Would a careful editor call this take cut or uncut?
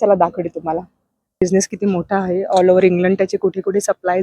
cut